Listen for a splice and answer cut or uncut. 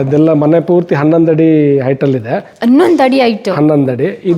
uncut